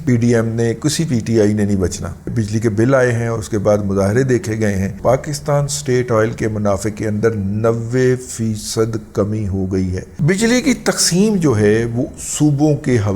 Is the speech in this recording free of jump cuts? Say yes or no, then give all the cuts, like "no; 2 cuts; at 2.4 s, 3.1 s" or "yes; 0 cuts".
no; 3 cuts; at 2.2 s, 5.0 s, 10.1 s